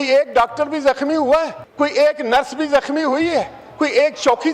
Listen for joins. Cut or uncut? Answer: cut